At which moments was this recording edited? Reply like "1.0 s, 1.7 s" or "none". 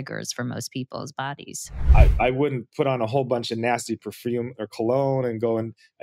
1.7 s